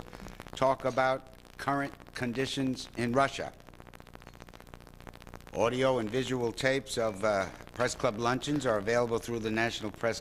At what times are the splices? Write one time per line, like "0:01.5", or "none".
0:09.3